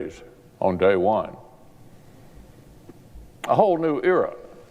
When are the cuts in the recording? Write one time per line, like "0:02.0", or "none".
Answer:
0:00.9